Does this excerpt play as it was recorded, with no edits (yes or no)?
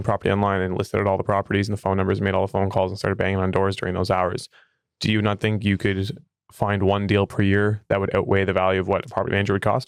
yes